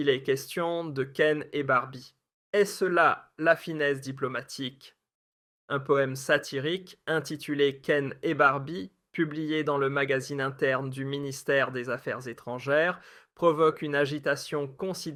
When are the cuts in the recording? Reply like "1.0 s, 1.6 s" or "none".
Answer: none